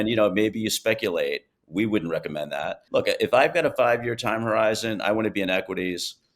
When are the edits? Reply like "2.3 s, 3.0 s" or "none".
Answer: 2.8 s